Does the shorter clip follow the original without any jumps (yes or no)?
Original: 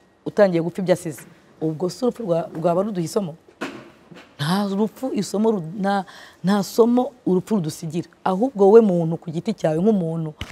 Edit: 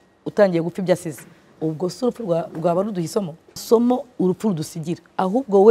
no